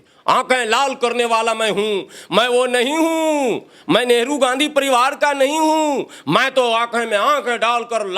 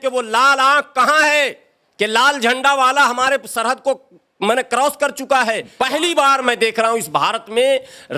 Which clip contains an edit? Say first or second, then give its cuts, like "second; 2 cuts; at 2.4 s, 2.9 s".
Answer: second; 1 cut; at 5.7 s